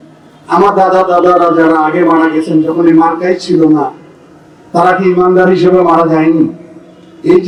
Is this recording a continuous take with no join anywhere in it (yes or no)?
yes